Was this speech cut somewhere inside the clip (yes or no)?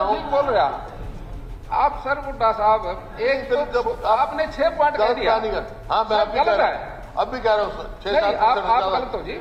no